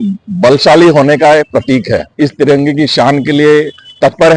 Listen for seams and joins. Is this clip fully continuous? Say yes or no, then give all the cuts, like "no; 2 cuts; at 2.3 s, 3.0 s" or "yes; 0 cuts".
no; 1 cut; at 2.1 s